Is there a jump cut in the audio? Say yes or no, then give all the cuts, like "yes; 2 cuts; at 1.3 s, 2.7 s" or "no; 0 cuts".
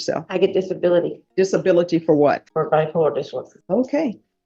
yes; 3 cuts; at 1.2 s, 2.5 s, 3.5 s